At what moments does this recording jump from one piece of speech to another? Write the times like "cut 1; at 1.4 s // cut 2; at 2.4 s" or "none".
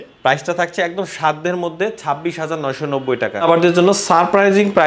cut 1; at 3.4 s